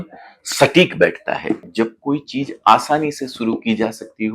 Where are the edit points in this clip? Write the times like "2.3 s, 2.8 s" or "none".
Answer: 1.6 s